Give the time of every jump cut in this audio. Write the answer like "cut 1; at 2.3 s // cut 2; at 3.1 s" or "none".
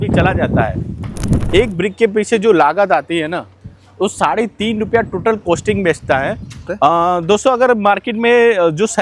cut 1; at 1.3 s // cut 2; at 6.7 s